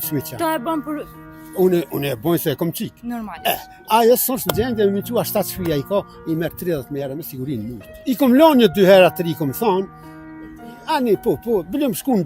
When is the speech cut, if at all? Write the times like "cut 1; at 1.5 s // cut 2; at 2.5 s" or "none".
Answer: cut 1; at 8.0 s